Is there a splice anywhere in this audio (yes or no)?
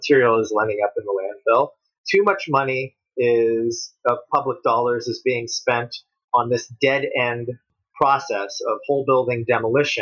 no